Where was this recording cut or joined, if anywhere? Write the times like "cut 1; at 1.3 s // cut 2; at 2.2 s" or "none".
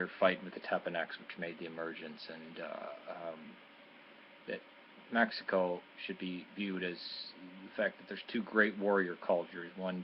none